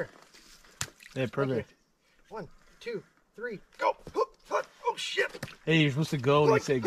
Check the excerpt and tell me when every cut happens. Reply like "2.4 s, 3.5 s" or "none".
none